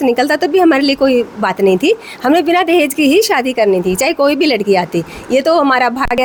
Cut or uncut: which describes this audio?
uncut